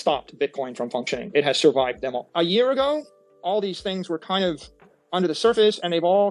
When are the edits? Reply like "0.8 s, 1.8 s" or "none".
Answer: 2.2 s